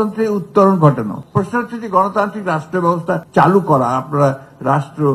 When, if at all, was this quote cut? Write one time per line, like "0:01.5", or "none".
0:01.2
0:03.2